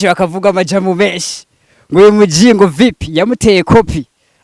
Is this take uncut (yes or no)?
yes